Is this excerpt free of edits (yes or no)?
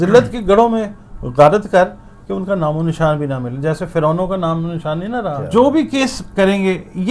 no